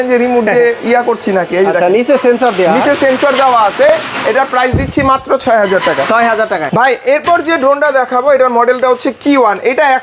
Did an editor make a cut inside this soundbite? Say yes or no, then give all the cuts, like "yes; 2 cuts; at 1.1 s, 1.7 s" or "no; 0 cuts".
no; 0 cuts